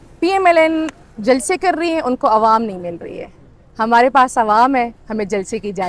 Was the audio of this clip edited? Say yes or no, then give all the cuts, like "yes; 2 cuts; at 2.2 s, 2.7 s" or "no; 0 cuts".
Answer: no; 0 cuts